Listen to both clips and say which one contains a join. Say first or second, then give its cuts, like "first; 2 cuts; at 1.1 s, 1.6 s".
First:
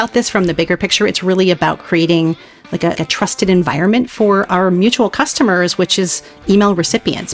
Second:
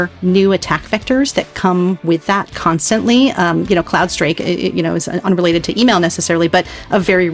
first; 1 cut; at 3.0 s